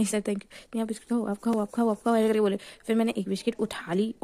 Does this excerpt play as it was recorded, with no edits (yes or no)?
yes